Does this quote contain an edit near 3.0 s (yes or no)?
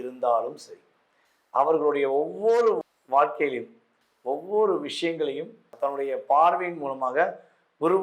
no